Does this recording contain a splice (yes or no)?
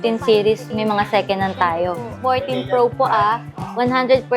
yes